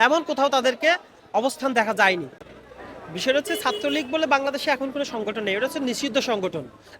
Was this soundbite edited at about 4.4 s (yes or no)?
no